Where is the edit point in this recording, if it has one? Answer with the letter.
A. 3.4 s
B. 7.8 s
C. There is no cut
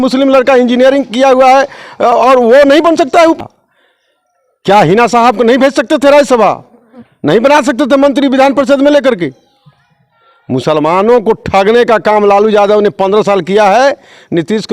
A